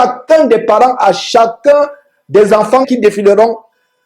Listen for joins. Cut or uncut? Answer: cut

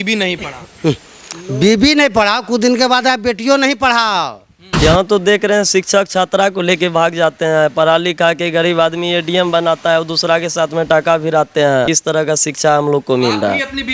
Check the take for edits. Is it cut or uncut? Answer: cut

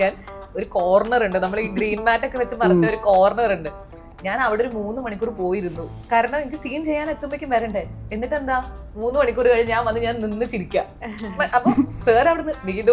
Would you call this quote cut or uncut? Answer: uncut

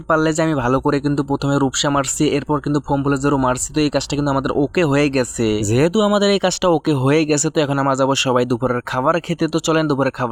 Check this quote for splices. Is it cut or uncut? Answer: uncut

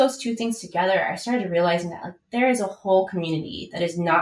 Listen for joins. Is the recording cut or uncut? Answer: uncut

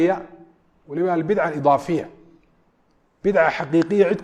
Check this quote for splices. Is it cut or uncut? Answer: uncut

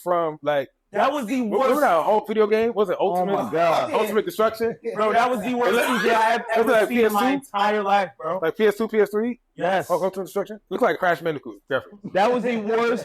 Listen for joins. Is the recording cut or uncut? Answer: cut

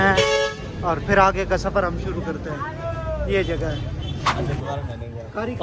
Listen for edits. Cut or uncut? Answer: cut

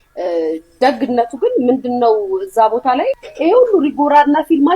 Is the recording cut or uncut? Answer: cut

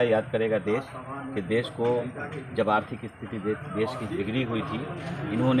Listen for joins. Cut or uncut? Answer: uncut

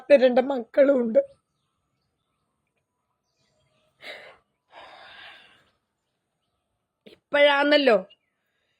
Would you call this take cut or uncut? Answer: uncut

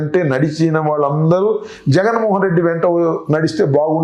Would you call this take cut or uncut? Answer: uncut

